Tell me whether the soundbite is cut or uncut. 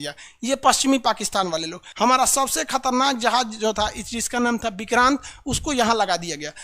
cut